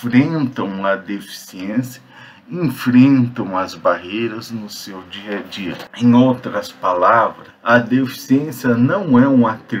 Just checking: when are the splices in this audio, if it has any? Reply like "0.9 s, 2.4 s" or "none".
5.8 s, 7.5 s